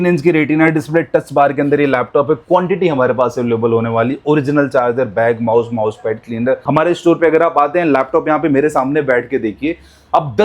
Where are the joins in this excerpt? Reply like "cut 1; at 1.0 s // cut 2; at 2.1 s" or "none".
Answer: cut 1; at 6.6 s